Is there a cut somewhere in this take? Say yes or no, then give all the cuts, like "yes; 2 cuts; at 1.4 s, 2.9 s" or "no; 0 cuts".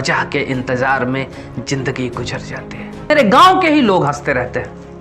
yes; 1 cut; at 3.1 s